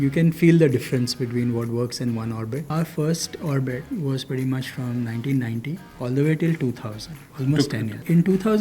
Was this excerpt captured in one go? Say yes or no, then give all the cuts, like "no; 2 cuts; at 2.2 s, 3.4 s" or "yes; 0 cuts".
no; 3 cuts; at 2.7 s, 5.8 s, 7.4 s